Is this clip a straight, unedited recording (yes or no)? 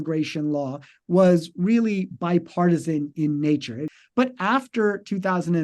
no